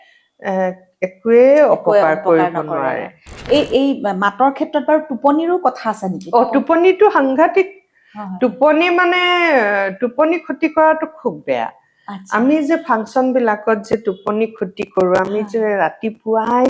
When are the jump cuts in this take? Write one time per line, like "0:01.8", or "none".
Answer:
0:03.3